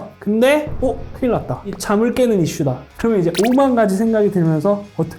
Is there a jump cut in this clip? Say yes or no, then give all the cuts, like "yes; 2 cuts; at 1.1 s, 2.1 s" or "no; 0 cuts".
yes; 1 cut; at 2.9 s